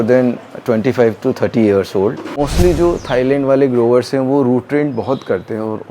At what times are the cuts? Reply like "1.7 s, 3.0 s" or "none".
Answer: 2.4 s